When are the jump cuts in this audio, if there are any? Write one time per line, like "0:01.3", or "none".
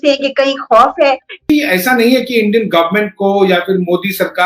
0:01.4